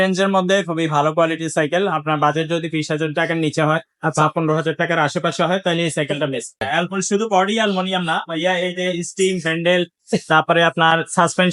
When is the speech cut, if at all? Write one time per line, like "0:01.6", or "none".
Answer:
0:06.6